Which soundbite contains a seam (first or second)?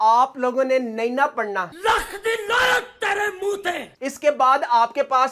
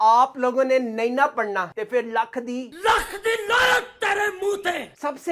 first